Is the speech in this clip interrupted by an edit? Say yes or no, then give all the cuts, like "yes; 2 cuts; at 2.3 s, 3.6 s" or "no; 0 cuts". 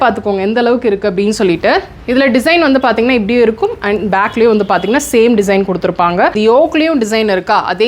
yes; 1 cut; at 6.4 s